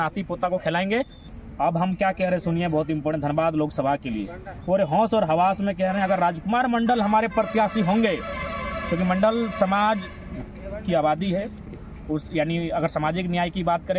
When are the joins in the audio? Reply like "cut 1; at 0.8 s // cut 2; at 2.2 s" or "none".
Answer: cut 1; at 1.2 s